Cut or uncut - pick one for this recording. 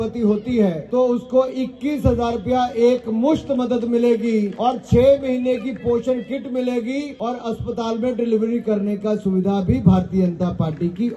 cut